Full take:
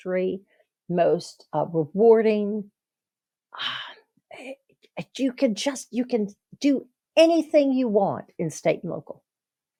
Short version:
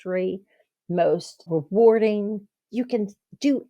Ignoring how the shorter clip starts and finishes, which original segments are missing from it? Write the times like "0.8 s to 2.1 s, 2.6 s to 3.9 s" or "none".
1.5 s to 1.7 s, 2.9 s to 5.8 s